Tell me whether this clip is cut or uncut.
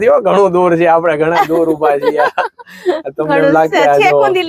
uncut